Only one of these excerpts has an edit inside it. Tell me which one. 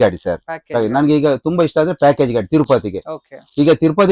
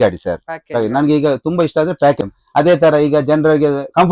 second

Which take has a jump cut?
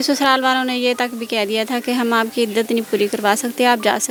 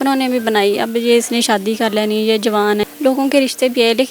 second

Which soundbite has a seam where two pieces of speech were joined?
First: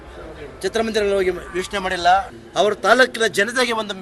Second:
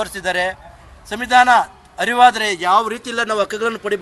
first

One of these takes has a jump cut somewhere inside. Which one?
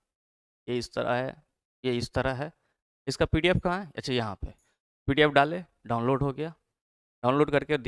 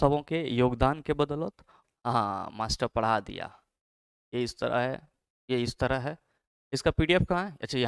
second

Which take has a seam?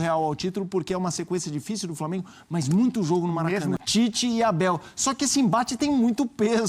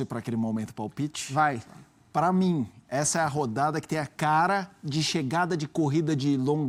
first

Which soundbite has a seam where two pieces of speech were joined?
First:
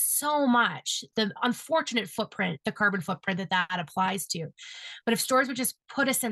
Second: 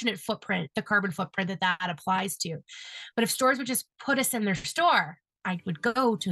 first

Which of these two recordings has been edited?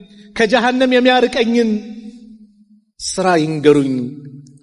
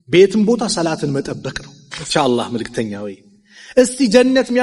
second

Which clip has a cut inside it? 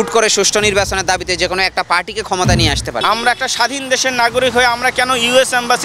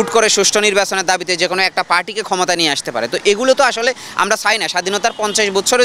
first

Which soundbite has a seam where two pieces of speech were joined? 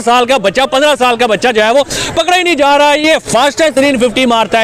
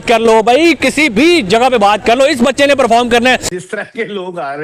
second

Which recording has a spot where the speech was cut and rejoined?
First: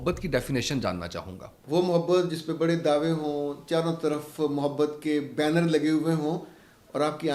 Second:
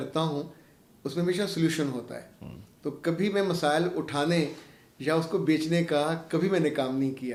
first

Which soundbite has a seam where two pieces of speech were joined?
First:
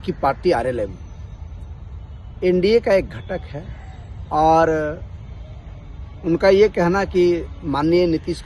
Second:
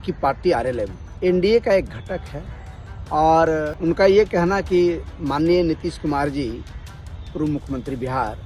second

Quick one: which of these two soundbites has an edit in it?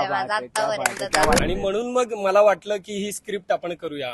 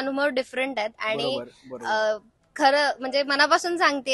first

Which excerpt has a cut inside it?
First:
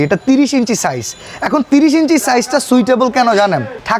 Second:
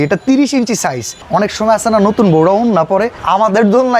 second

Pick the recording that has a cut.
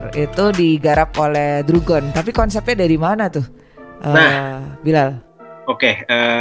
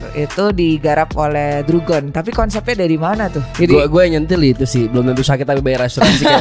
second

